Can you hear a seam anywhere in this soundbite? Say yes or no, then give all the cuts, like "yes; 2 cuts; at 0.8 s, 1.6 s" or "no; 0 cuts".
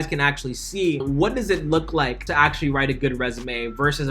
yes; 2 cuts; at 1.0 s, 2.2 s